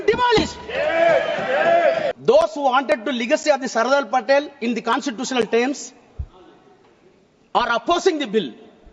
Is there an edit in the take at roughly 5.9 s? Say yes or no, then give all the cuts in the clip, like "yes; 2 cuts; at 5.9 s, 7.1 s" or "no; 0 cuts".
no; 1 cut; at 2.1 s